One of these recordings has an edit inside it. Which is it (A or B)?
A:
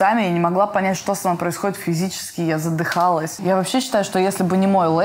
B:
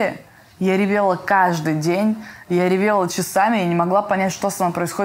A